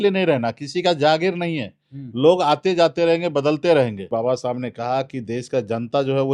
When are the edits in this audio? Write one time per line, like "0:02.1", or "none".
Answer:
0:04.1